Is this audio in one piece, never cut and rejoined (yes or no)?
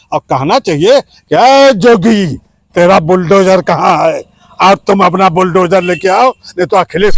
yes